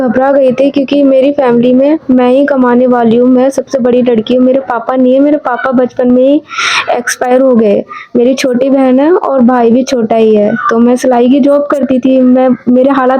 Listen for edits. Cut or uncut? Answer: uncut